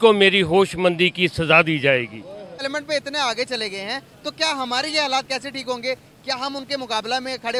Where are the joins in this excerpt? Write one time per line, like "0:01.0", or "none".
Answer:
0:02.6